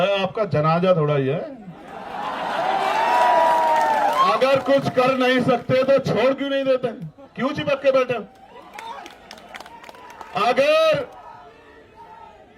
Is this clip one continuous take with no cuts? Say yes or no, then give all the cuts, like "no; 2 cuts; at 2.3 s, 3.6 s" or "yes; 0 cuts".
yes; 0 cuts